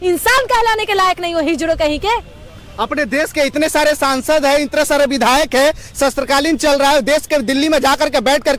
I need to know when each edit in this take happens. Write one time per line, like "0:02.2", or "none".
none